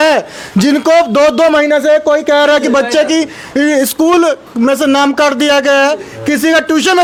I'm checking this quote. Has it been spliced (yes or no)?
no